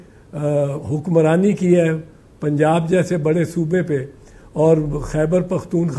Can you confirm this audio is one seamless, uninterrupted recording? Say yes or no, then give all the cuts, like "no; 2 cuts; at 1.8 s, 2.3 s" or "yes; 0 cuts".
yes; 0 cuts